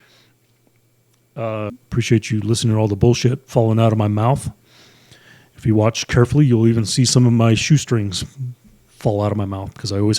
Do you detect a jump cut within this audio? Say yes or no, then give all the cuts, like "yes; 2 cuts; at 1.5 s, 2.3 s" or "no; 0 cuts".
yes; 1 cut; at 1.7 s